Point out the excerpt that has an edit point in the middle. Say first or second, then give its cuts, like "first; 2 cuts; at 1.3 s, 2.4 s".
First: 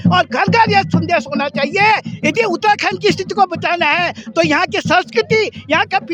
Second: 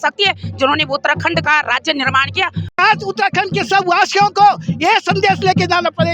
second; 1 cut; at 2.8 s